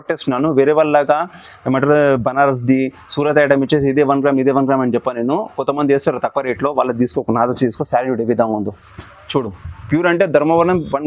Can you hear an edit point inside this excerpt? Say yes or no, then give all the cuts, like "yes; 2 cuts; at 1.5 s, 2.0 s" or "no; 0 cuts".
no; 0 cuts